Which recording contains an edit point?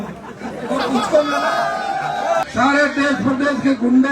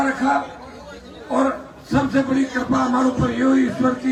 first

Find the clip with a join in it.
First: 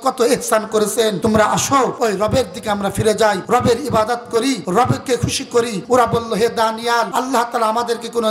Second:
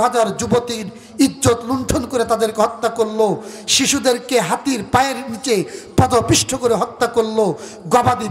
first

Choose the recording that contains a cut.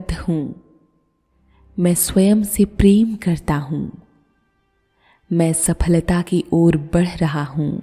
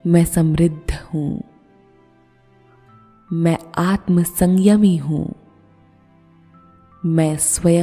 second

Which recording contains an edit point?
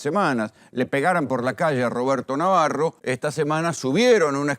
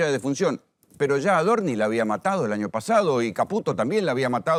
first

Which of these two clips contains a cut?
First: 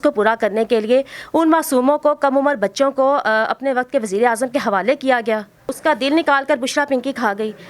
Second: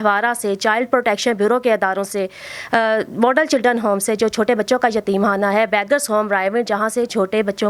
first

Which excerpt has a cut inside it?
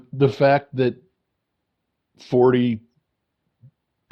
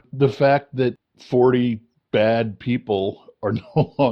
second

